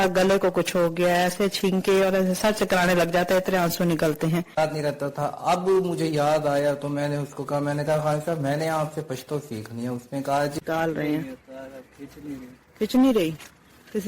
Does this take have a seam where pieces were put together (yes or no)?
yes